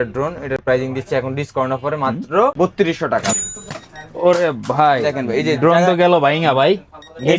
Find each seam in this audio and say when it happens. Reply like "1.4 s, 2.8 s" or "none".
3.4 s